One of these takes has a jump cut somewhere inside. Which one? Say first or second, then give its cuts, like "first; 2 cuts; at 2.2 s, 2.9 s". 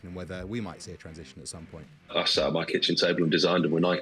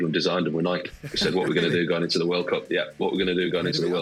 first; 1 cut; at 2.1 s